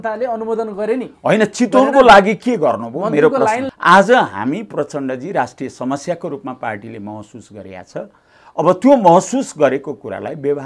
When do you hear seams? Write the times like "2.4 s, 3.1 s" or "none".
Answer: 3.6 s